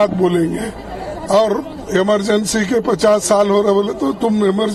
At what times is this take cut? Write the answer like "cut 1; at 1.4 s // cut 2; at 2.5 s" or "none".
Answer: none